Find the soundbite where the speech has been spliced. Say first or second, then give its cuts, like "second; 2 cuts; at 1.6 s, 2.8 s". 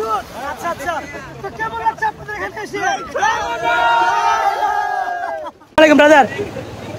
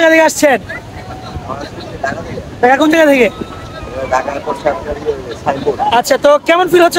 first; 1 cut; at 5.8 s